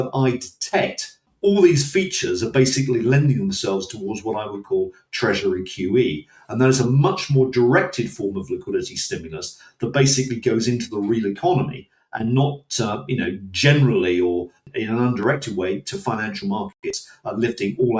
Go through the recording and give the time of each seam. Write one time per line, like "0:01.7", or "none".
0:01.2

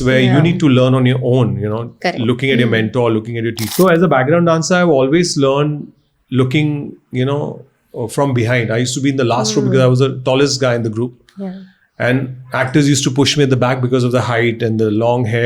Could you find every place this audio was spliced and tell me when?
0:03.6

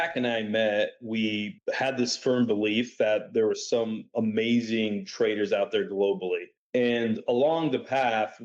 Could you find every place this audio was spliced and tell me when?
0:01.5
0:06.5

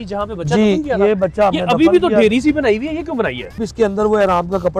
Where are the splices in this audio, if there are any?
0:03.6

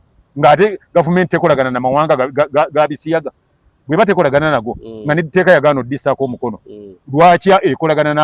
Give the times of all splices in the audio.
none

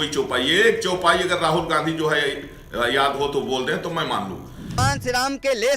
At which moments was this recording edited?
0:04.8

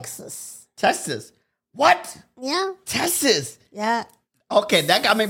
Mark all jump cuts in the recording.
none

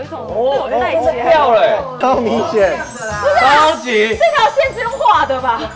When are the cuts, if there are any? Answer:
0:01.9

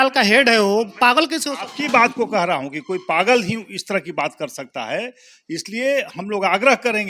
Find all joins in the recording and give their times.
none

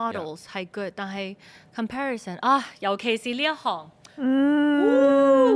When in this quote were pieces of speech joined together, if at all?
none

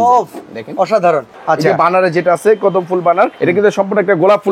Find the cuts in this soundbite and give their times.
0:01.3
0:03.4

